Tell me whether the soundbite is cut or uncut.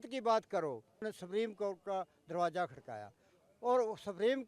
cut